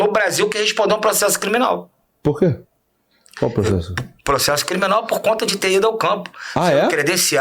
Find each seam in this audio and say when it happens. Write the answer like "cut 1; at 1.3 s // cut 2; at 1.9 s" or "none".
none